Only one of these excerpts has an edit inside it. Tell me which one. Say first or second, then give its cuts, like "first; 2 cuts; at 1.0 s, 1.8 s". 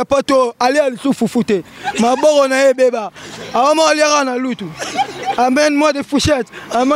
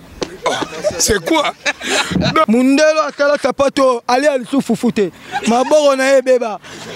second; 1 cut; at 2.5 s